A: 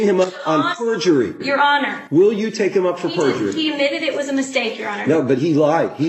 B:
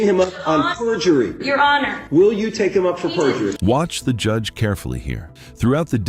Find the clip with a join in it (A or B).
A